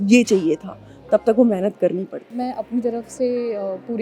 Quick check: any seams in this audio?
yes; 1 cut; at 2.3 s

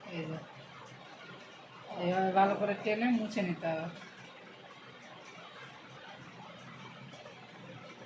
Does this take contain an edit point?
no; 0 cuts

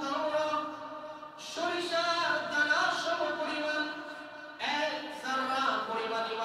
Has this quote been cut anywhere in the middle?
no; 0 cuts

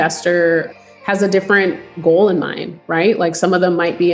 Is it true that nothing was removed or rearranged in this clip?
yes; 0 cuts

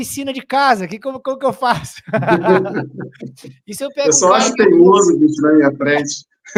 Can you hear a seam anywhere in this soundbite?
no; 0 cuts

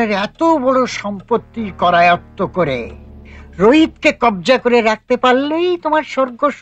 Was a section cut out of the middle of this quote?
no; 0 cuts

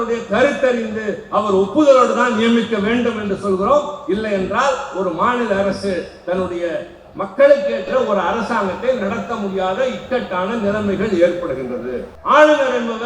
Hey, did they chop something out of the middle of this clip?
yes; 1 cut; at 12.1 s

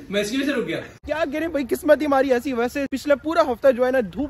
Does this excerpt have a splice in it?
yes; 2 cuts; at 1.1 s, 2.9 s

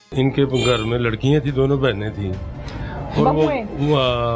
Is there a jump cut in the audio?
no; 0 cuts

